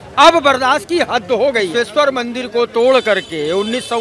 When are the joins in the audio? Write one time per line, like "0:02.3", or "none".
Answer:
0:01.7

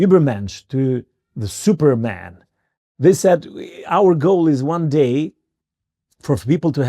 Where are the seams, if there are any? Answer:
0:02.8

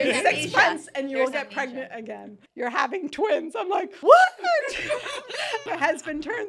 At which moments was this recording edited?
0:02.4
0:03.9
0:05.6

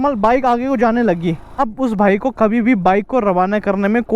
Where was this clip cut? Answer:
0:01.6

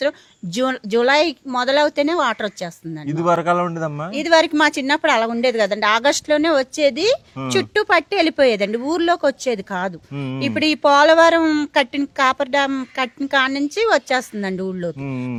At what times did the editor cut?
none

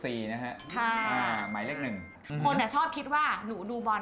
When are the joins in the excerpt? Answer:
0:02.2

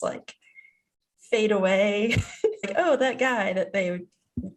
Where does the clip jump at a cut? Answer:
0:02.7

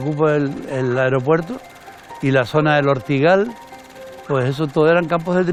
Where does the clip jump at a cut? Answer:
none

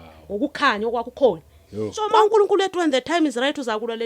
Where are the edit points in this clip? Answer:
0:02.0

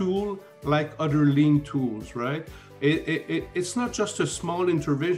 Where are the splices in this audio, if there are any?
none

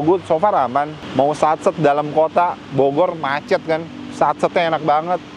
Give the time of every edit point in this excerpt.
0:01.0

